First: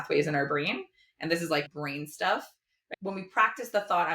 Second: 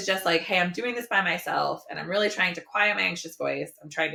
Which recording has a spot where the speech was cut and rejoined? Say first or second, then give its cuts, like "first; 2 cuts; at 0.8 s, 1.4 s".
first; 2 cuts; at 1.7 s, 2.9 s